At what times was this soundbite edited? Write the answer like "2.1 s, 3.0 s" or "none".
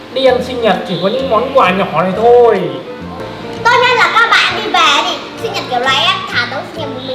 3.2 s